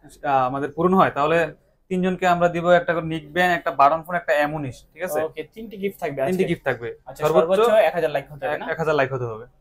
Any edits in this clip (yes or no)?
no